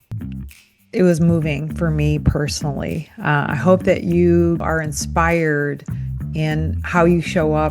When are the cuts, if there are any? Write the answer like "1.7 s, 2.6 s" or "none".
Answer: 4.6 s